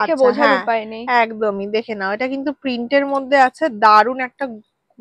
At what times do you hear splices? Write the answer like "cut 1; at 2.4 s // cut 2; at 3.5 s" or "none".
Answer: none